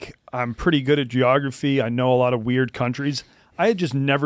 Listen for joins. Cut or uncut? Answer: uncut